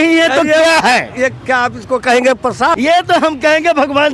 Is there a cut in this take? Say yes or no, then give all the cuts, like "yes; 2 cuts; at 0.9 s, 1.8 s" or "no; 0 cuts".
yes; 1 cut; at 2.8 s